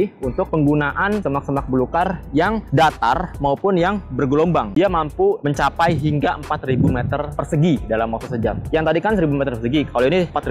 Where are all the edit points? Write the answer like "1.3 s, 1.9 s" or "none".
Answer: 4.7 s